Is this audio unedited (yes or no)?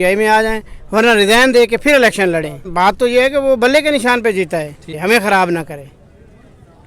no